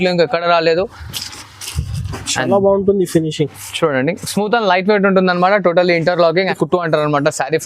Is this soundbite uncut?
no; 1 cut; at 6.5 s

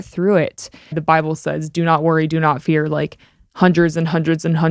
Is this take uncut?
no; 1 cut; at 1.0 s

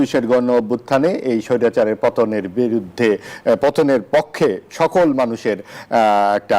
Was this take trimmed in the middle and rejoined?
no; 0 cuts

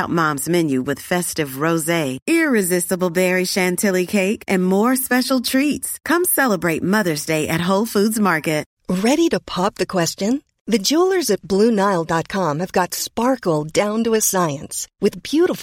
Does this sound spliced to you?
yes; 1 cut; at 8.7 s

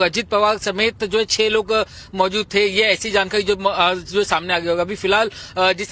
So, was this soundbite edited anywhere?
no; 0 cuts

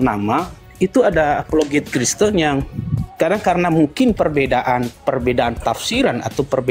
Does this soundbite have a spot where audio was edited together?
no; 0 cuts

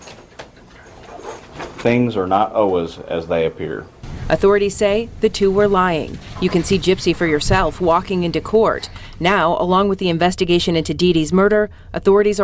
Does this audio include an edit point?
no; 0 cuts

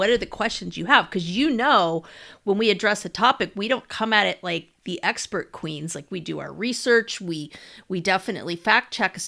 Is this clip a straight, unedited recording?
yes; 0 cuts

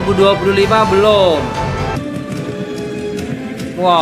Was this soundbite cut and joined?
yes; 1 cut; at 2.0 s

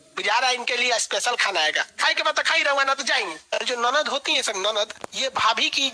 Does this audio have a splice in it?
yes; 2 cuts; at 3.4 s, 5.0 s

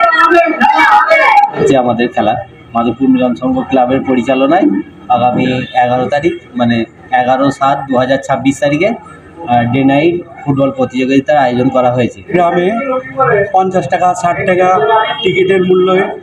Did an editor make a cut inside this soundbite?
yes; 2 cuts; at 1.6 s, 12.3 s

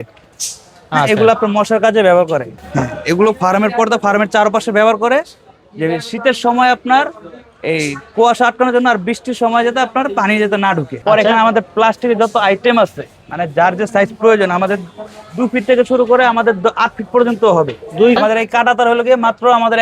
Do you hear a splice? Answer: yes; 3 cuts; at 2.6 s, 10.9 s, 18.2 s

